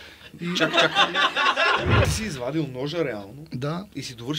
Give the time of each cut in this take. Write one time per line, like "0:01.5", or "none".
0:02.1